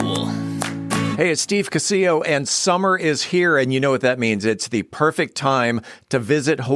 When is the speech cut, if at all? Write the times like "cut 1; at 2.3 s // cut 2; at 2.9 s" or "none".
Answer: cut 1; at 1.1 s